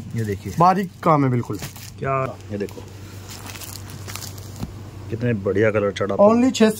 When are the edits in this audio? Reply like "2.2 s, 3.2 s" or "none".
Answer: 2.3 s